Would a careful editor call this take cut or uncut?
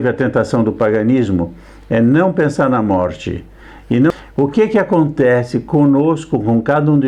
cut